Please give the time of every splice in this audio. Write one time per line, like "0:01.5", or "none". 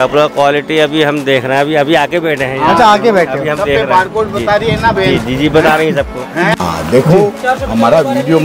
0:06.5